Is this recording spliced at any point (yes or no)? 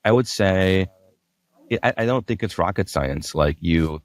no